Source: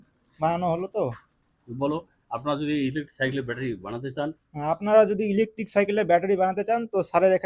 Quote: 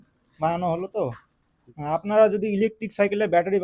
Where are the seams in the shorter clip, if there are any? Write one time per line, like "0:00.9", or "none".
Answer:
0:01.6